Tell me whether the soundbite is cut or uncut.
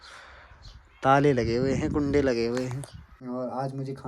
cut